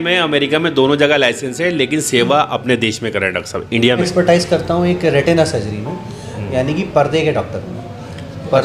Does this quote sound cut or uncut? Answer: cut